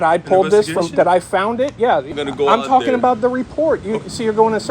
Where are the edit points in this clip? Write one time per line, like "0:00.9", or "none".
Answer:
0:02.1